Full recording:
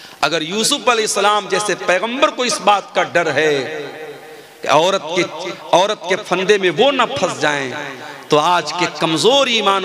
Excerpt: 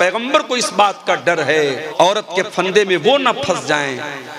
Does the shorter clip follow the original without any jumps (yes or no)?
no